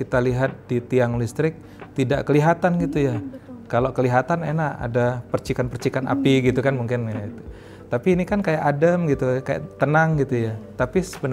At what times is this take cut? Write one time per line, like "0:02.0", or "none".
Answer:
none